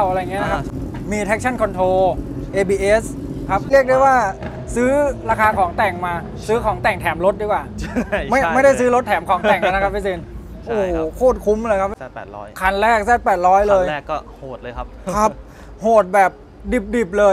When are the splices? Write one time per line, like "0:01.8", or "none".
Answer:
0:03.7
0:12.0